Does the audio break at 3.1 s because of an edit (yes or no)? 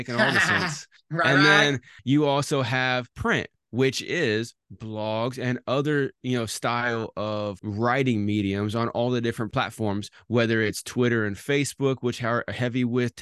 yes